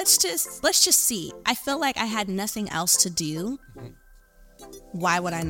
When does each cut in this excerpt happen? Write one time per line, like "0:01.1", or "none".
none